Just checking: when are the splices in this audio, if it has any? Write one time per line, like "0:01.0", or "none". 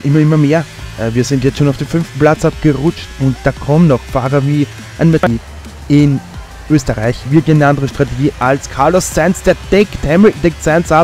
0:05.2